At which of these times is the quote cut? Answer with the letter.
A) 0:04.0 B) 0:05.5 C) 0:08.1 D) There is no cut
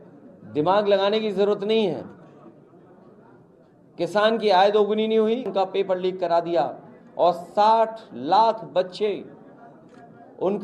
B